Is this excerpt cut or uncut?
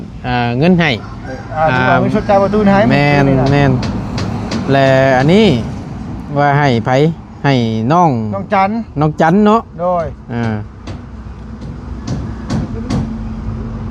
uncut